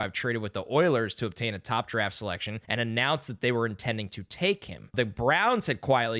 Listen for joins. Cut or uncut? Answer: cut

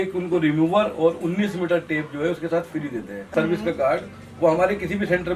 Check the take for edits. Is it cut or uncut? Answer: cut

